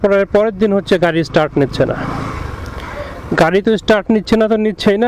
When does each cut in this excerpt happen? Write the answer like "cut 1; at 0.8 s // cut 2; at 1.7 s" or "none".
none